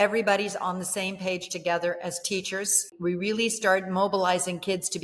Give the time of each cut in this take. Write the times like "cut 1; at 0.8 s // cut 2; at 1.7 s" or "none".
cut 1; at 2.9 s